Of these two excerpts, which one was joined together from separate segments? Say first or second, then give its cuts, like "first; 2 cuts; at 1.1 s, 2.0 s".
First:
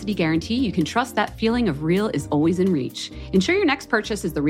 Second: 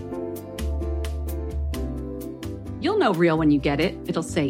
second; 1 cut; at 1.3 s